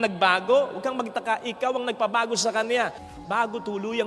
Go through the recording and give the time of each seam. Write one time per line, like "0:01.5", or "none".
0:03.2